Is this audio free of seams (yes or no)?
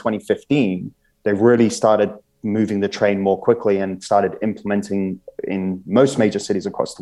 yes